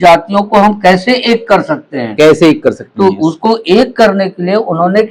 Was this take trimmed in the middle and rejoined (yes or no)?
no